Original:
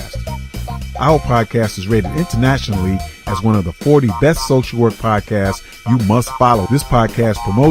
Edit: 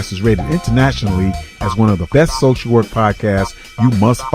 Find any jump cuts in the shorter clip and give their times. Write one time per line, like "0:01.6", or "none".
0:02.1